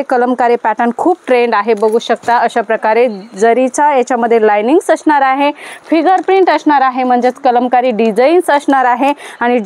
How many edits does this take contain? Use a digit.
0